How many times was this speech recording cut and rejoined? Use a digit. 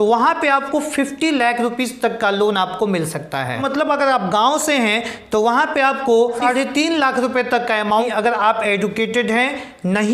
3